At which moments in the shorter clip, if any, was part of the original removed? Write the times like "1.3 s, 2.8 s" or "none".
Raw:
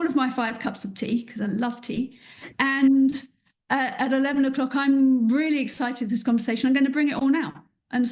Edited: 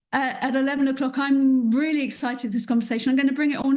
none